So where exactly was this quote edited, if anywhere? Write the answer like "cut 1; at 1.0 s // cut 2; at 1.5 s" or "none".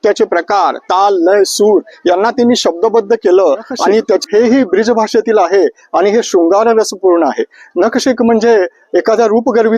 cut 1; at 4.2 s